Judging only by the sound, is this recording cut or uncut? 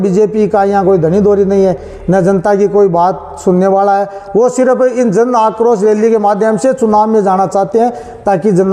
uncut